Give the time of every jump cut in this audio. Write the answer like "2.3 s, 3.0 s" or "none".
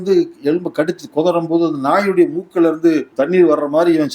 3.1 s